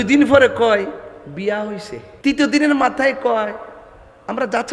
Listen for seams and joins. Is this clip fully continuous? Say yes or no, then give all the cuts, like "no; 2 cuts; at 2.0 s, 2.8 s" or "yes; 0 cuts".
no; 1 cut; at 2.0 s